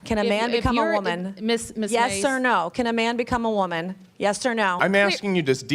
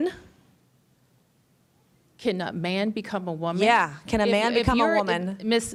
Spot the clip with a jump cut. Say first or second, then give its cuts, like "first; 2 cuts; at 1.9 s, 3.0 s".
first; 1 cut; at 4.8 s